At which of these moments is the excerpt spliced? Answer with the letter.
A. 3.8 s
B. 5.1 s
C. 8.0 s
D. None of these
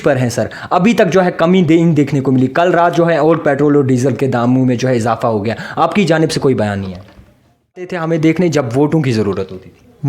C